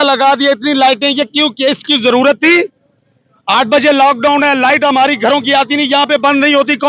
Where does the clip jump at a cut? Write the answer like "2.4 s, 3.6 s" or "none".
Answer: none